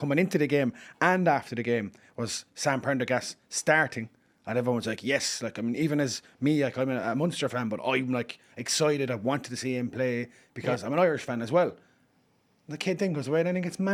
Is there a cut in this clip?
no; 0 cuts

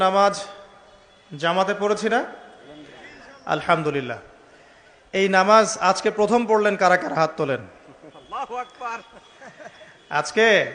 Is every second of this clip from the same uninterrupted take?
yes; 0 cuts

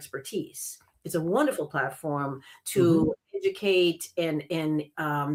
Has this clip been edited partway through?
no; 0 cuts

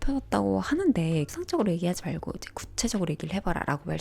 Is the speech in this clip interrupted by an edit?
yes; 1 cut; at 1.4 s

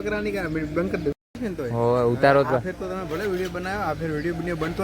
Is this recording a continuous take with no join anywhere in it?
no; 1 cut; at 1.3 s

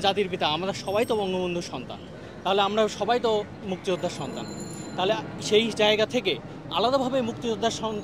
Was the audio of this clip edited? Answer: no; 0 cuts

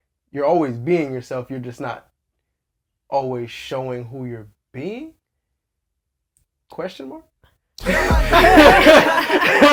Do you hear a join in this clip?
no; 0 cuts

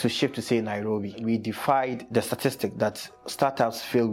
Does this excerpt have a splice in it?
yes; 2 cuts; at 1.2 s, 2.0 s

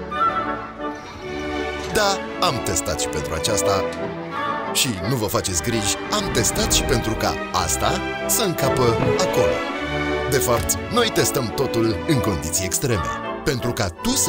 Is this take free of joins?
yes; 0 cuts

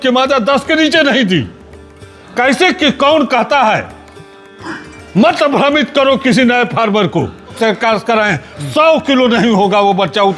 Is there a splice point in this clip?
yes; 1 cut; at 7.6 s

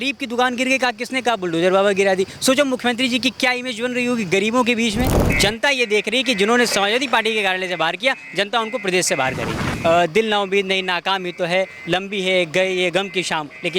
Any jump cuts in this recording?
yes; 2 cuts; at 5.2 s, 9.7 s

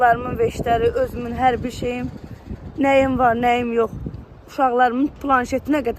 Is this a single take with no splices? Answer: yes; 0 cuts

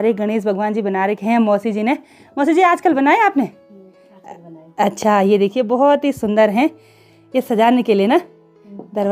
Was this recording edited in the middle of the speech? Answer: no; 0 cuts

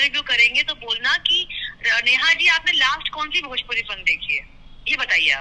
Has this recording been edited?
no; 0 cuts

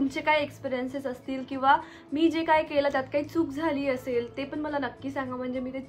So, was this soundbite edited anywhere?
no; 0 cuts

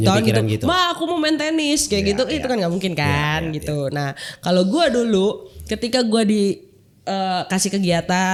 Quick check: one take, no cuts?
yes; 0 cuts

